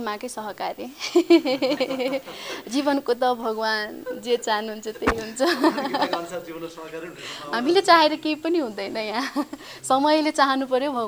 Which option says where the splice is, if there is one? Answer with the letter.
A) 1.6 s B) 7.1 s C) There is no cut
C